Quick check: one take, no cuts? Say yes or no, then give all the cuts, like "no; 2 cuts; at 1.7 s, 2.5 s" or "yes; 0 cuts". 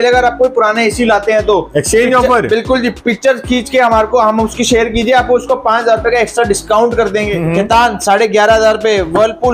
no; 1 cut; at 7.3 s